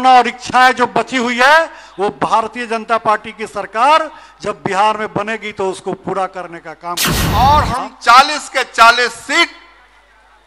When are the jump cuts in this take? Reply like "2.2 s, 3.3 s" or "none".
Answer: none